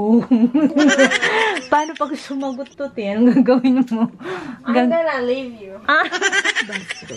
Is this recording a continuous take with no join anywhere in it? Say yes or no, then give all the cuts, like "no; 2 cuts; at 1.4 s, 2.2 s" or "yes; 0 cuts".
yes; 0 cuts